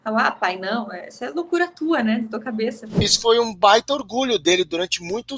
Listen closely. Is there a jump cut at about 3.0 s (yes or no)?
yes